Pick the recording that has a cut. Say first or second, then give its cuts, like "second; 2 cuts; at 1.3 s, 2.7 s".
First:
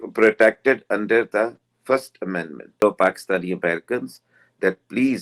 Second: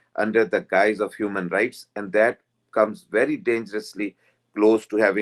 first; 1 cut; at 2.8 s